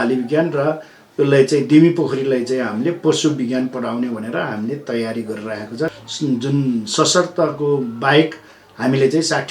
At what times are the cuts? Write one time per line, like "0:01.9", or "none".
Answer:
0:06.0